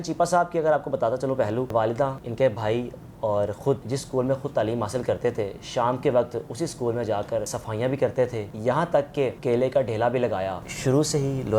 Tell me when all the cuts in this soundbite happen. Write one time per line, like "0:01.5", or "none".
0:02.1
0:03.8
0:07.6
0:08.5
0:10.7